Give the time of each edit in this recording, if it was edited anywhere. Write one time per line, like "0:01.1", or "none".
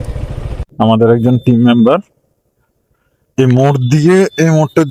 none

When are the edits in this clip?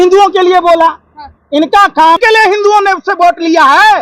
0:02.2

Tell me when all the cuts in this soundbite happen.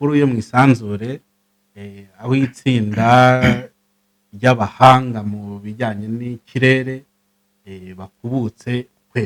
none

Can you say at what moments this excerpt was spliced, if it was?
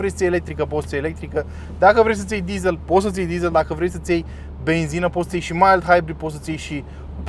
none

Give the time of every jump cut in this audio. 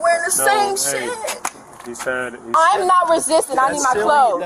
0:02.5

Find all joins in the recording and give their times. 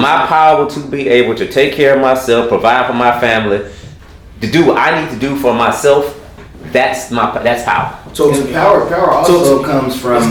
none

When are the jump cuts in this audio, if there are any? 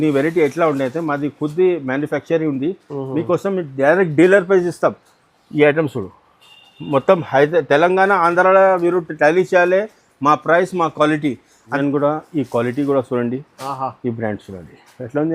0:11.5

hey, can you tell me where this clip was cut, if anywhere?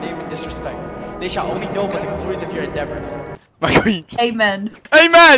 0:03.4
0:04.3

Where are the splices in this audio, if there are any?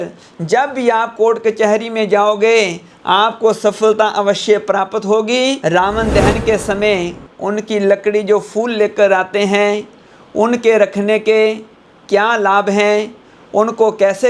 0:05.6

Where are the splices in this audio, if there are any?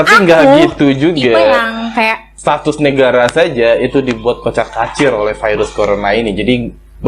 0:02.4

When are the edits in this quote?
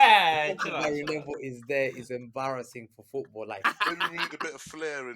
0:03.6

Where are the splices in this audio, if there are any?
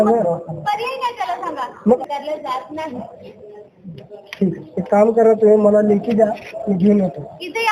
0:02.0

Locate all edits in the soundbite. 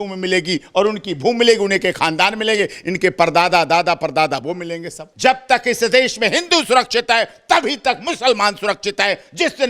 0:05.0

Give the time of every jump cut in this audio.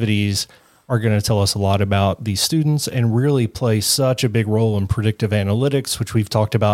none

